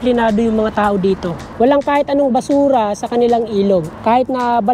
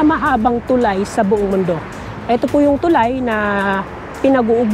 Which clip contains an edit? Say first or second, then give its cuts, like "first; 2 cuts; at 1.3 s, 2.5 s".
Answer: first; 2 cuts; at 1.4 s, 3.9 s